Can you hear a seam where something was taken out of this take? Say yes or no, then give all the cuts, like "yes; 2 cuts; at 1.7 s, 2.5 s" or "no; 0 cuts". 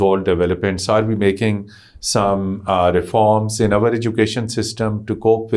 no; 0 cuts